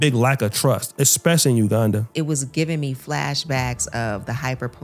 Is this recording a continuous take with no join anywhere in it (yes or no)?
no